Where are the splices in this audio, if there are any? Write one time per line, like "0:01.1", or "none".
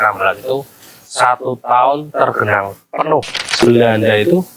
0:03.5